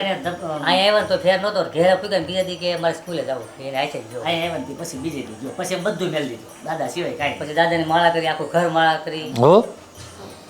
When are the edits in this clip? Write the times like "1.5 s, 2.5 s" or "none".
9.2 s